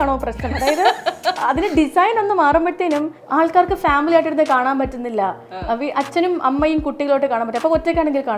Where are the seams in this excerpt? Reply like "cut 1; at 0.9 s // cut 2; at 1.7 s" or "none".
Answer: cut 1; at 1.4 s // cut 2; at 3.2 s